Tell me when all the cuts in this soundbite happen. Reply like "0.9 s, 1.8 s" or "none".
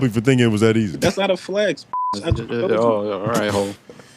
0.9 s